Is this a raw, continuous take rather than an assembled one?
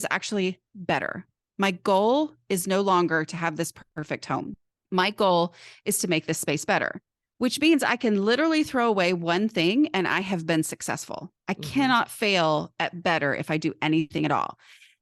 no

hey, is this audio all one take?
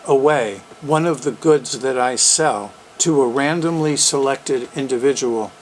yes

